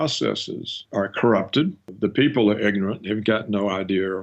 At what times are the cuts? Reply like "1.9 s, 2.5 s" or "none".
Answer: none